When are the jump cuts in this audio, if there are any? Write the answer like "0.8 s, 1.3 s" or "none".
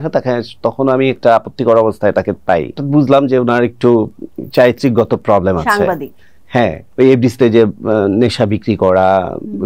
2.8 s, 6.8 s